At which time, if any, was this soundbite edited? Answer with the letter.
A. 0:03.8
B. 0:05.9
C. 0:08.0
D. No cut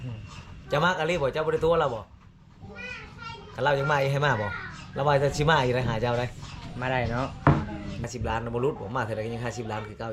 C